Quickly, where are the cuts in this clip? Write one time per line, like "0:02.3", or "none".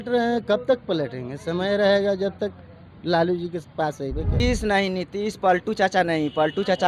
0:04.4